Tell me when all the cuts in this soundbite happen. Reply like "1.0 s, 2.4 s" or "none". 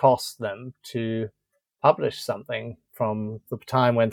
none